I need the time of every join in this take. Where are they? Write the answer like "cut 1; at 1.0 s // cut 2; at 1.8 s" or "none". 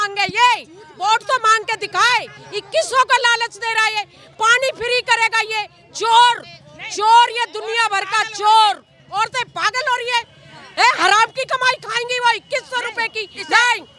none